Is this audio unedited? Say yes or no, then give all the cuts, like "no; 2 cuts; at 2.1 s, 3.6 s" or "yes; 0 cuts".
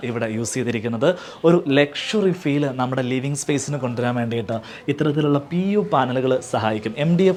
yes; 0 cuts